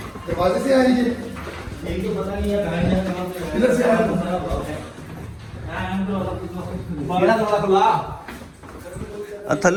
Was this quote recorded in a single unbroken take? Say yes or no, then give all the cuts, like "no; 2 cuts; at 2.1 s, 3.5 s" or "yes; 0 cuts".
yes; 0 cuts